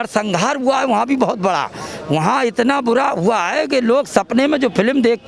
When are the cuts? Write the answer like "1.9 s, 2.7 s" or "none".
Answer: none